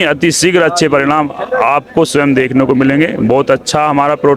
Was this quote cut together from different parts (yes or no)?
no